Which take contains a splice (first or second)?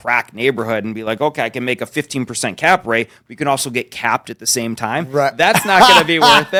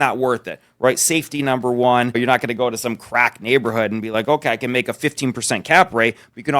second